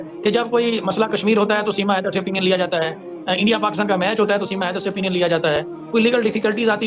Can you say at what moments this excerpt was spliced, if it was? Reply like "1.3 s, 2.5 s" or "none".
none